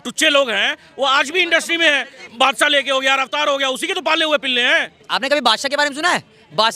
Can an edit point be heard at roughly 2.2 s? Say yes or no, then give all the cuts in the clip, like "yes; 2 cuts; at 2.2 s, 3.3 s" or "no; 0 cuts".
yes; 2 cuts; at 2.2 s, 5.0 s